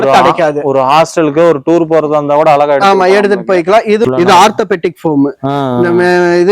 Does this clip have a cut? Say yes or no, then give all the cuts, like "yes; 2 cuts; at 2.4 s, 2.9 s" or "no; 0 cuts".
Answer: yes; 1 cut; at 4.0 s